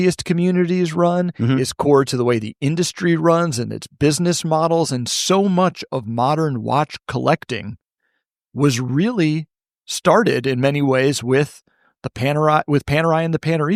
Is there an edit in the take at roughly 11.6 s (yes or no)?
no